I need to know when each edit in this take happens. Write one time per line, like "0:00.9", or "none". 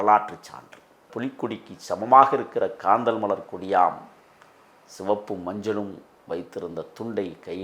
0:01.1